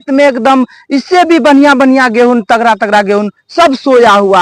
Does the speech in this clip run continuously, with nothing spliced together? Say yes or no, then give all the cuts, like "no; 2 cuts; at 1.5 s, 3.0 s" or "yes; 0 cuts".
yes; 0 cuts